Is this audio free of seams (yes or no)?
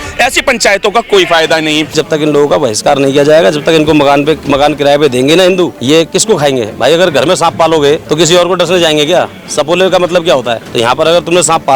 no